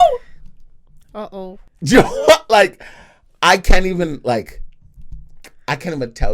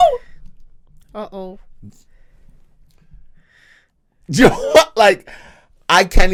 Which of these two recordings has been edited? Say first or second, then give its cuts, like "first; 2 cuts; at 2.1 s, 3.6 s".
first; 1 cut; at 1.7 s